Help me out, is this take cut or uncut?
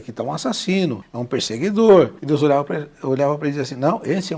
cut